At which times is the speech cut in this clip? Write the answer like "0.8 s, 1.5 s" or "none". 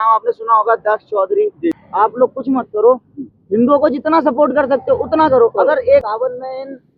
1.8 s, 6.0 s